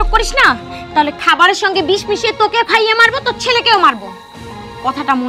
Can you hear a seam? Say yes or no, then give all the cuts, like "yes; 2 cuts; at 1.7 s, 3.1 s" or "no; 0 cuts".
no; 0 cuts